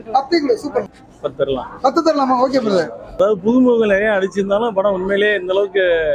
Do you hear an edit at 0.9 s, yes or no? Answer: yes